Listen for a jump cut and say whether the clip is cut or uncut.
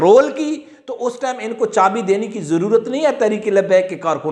uncut